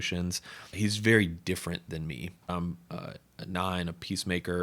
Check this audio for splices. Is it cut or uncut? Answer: cut